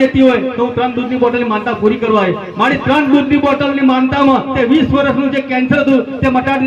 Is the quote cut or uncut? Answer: uncut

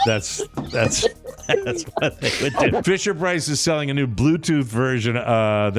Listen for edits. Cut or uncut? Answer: cut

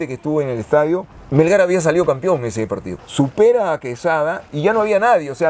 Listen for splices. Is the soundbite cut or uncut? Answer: cut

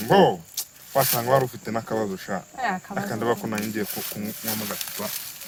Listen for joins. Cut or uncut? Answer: uncut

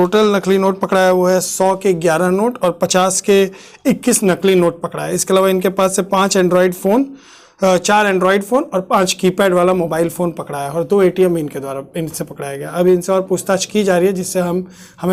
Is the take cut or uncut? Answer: uncut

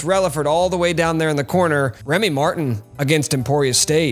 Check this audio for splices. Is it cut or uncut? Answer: cut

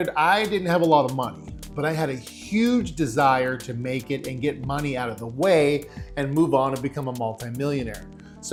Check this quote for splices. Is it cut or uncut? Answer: uncut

